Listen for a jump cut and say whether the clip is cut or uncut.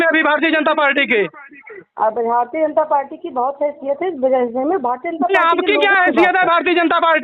uncut